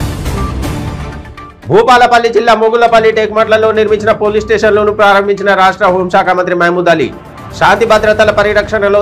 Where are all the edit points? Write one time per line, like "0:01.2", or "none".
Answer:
0:00.9